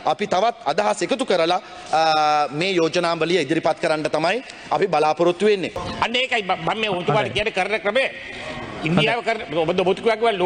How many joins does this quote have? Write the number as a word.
one